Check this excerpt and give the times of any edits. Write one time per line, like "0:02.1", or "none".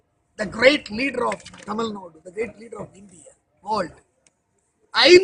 none